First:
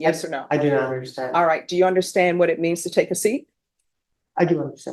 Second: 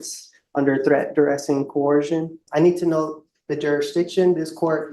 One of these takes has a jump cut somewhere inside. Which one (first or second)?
second